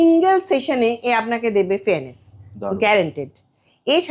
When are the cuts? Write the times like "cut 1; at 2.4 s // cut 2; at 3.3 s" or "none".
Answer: none